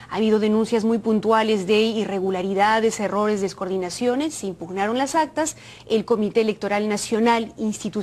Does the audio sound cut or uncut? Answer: uncut